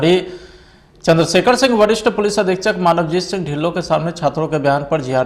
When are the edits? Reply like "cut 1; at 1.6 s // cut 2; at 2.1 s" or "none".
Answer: none